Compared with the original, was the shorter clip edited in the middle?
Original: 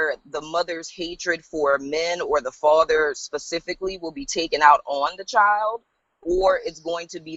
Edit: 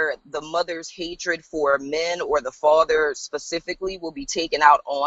no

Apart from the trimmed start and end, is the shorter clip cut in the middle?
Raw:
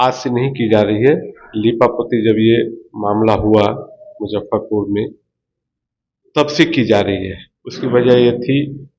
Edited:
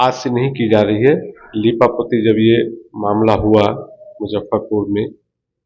no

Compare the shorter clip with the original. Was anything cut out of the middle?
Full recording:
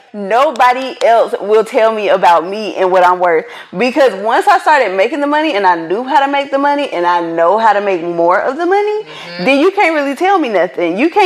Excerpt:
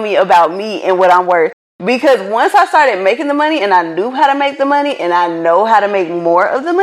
no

